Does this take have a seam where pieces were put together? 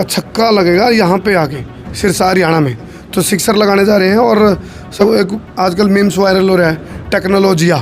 yes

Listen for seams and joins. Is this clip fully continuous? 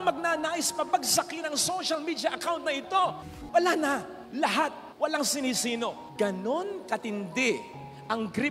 no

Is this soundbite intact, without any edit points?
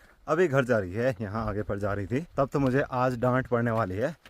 no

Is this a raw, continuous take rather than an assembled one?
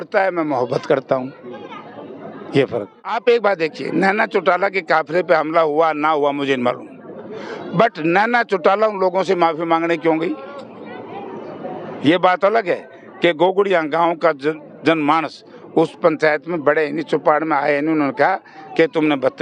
no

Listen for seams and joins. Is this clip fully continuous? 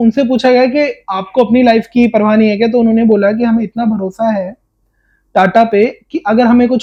yes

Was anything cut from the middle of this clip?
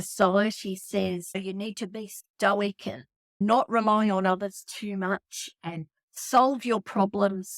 yes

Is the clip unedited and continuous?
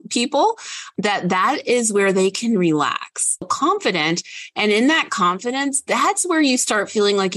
no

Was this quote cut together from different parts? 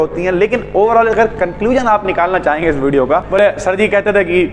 yes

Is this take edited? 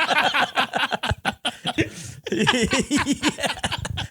yes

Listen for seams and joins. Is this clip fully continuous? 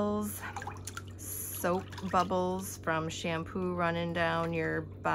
yes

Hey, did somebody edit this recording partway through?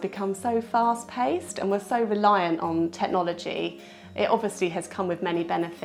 no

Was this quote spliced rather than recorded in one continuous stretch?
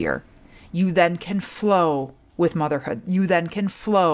no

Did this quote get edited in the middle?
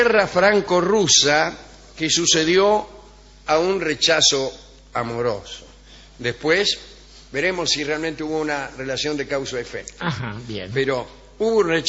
no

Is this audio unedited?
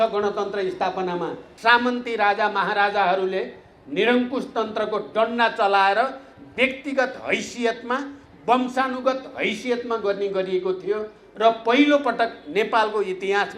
no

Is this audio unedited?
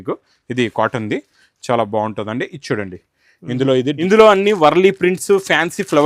no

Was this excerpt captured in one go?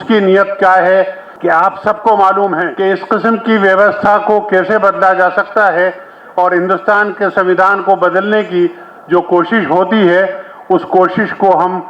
no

